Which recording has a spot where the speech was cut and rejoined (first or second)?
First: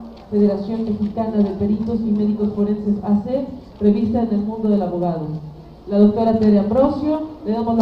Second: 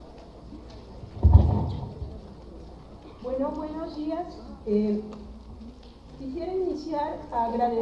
first